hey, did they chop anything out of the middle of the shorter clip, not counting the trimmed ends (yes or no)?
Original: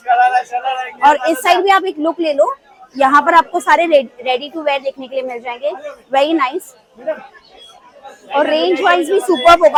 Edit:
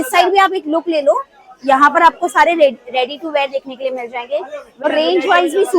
yes